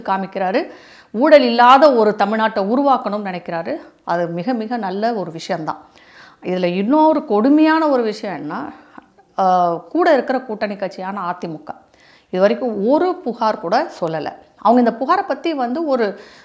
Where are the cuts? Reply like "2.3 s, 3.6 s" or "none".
none